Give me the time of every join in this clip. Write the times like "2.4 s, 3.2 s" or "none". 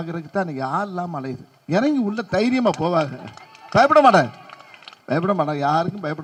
none